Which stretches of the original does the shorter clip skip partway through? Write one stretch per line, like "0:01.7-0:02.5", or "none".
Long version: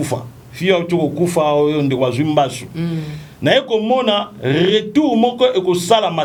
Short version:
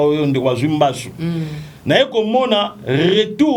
none